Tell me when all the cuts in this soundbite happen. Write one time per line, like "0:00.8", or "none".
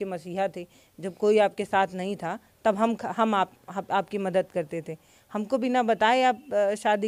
none